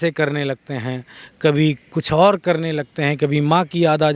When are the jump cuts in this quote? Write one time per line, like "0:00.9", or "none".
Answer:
none